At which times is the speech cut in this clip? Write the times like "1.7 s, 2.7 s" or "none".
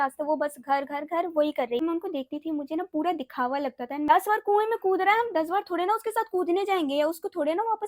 1.8 s, 4.1 s